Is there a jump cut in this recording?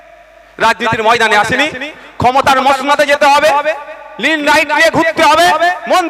no; 0 cuts

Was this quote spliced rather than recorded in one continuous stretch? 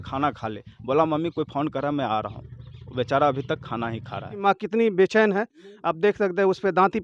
yes; 1 cut; at 4.4 s

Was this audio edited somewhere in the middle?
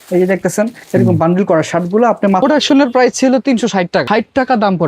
yes; 2 cuts; at 2.4 s, 4.0 s

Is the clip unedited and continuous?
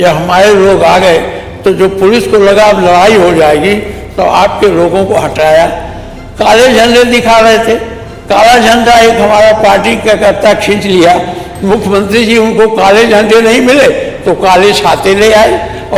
yes; 0 cuts

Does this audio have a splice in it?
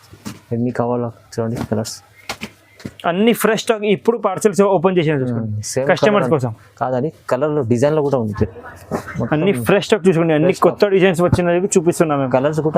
yes; 1 cut; at 8.5 s

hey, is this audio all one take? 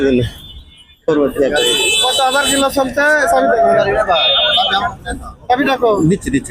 yes; 0 cuts

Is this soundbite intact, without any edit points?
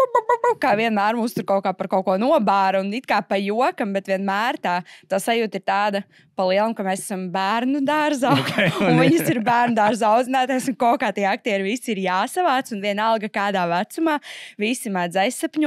yes; 0 cuts

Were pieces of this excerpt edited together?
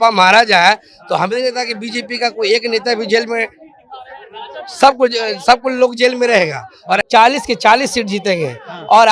yes; 1 cut; at 7.0 s

